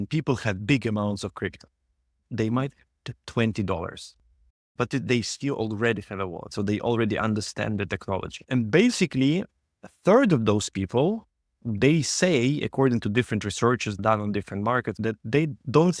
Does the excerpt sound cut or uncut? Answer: cut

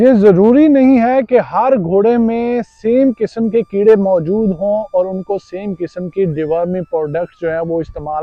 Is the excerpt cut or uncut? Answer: uncut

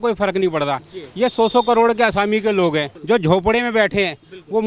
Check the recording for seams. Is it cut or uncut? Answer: cut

